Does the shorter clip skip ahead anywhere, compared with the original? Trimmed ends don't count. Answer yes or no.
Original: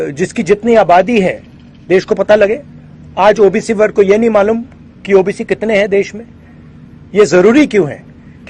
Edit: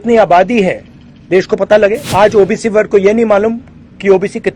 yes